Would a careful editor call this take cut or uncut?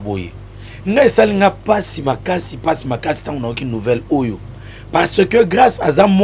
uncut